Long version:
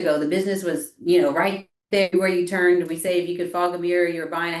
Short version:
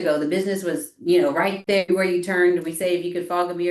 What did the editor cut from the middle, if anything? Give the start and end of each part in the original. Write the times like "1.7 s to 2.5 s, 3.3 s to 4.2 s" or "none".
1.6 s to 1.8 s